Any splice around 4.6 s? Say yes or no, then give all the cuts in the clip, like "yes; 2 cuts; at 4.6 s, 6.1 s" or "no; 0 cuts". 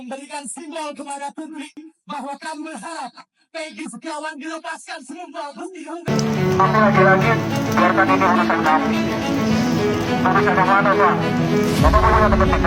no; 1 cut; at 6.1 s